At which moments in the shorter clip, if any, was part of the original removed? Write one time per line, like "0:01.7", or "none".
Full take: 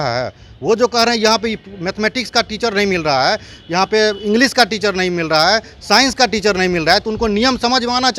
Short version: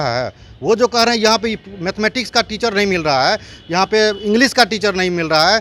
none